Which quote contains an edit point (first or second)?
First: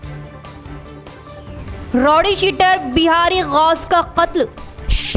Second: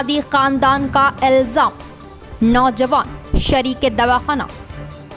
first